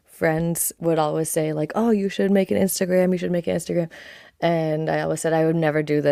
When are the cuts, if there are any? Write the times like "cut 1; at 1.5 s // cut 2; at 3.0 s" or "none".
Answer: none